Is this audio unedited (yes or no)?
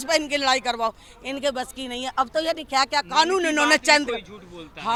yes